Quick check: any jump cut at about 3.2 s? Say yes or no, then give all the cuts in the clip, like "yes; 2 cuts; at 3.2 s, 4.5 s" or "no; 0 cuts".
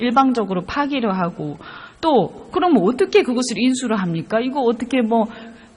yes; 1 cut; at 3.2 s